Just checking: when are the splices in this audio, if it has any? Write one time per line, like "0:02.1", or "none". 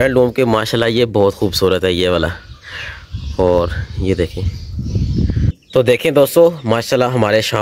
0:05.6